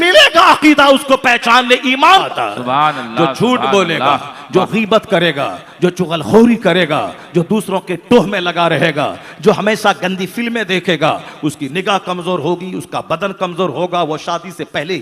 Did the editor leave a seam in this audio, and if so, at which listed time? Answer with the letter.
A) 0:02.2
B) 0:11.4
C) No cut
A